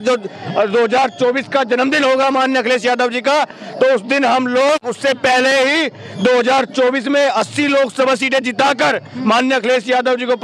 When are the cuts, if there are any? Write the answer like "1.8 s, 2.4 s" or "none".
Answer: none